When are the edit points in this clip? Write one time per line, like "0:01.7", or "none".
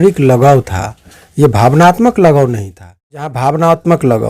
0:03.2